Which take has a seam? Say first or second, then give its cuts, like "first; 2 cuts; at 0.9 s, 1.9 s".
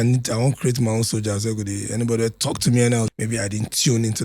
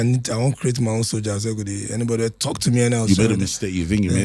first; 1 cut; at 3.1 s